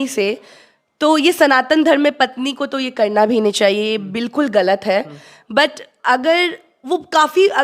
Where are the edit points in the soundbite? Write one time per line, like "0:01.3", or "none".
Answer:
none